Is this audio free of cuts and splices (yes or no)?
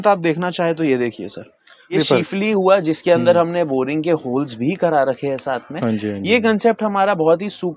no